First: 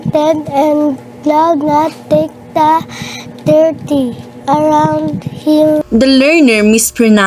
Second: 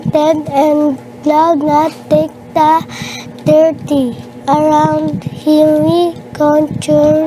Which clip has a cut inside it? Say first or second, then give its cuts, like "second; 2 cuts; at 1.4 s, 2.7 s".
second; 1 cut; at 5.7 s